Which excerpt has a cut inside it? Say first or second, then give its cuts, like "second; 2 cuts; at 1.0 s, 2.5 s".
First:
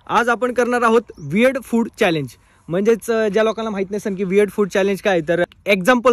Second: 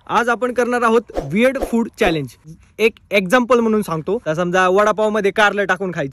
second; 2 cuts; at 2.8 s, 4.3 s